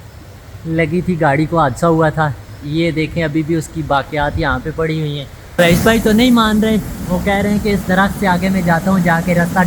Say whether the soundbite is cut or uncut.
cut